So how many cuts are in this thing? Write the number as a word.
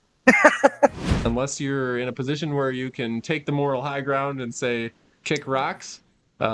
one